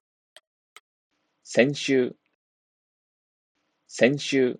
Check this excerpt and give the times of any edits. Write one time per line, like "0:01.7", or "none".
none